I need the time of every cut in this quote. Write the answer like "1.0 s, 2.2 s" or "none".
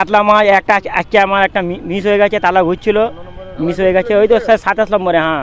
none